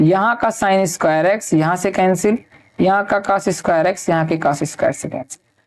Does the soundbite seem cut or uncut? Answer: uncut